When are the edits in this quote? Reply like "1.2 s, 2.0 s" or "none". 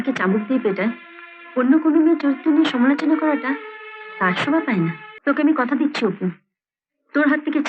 5.1 s